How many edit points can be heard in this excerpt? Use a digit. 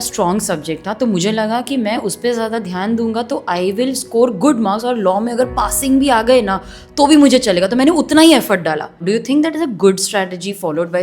1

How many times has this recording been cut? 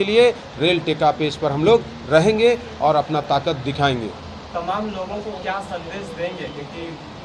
0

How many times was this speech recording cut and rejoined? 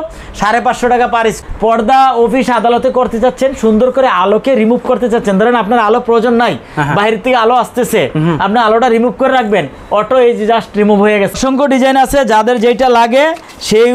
2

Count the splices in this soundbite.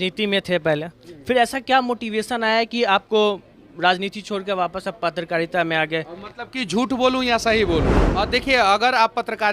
1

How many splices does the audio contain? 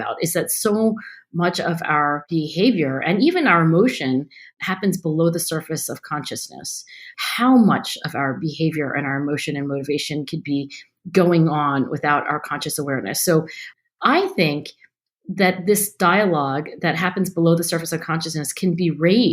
4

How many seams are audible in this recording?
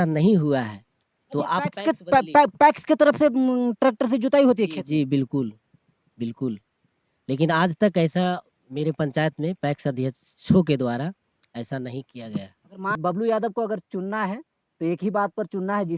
1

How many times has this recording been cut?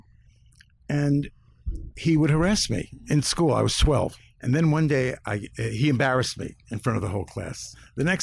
1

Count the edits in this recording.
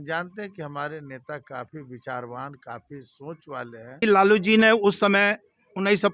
1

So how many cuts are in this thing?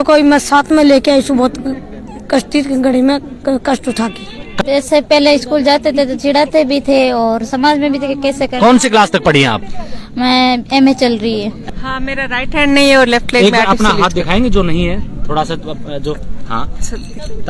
2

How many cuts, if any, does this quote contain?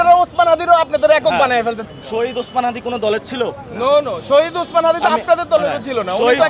1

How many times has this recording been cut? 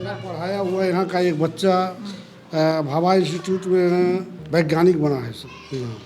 1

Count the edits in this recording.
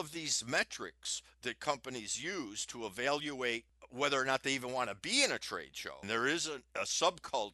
3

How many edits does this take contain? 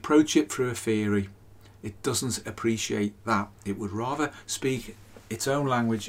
0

